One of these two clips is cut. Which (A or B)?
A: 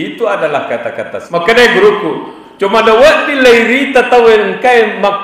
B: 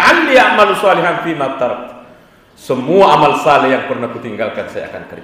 A